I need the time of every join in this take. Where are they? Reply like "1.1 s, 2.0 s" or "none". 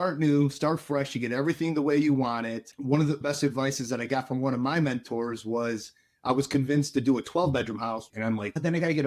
8.1 s